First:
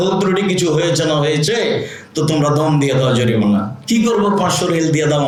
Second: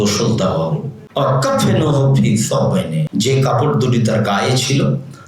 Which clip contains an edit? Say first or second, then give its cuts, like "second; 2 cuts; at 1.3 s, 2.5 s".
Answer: second; 2 cuts; at 0.9 s, 3.0 s